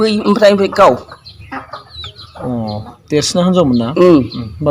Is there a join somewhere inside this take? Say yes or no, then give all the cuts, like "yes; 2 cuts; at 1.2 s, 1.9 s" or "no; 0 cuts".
no; 0 cuts